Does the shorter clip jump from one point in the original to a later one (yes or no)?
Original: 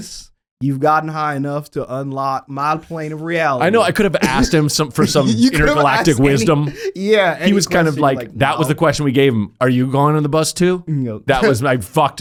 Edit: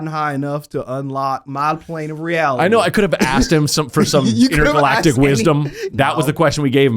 yes